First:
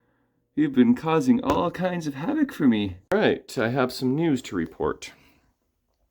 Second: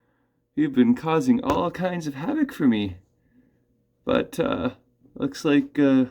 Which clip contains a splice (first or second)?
first